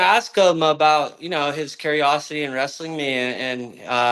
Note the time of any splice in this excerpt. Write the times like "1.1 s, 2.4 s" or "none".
none